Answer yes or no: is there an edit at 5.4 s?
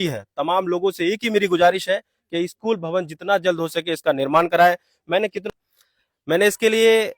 yes